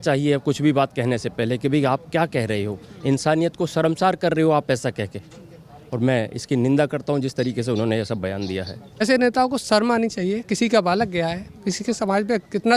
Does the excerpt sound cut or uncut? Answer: cut